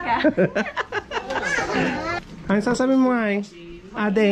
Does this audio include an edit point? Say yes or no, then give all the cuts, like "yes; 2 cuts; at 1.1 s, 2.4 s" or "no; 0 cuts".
yes; 1 cut; at 2.2 s